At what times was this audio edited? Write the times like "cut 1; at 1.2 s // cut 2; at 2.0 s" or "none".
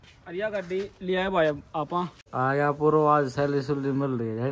cut 1; at 2.2 s